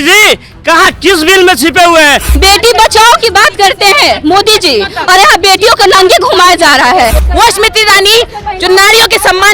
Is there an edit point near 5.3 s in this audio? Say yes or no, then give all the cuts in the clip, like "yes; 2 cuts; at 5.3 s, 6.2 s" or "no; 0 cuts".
no; 2 cuts; at 2.3 s, 7.2 s